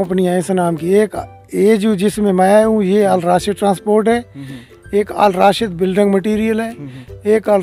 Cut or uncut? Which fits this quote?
uncut